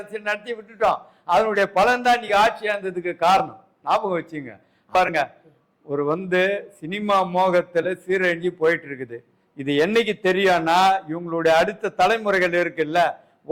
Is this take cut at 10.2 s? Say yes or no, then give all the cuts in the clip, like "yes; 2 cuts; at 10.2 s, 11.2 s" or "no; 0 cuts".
no; 1 cut; at 4.9 s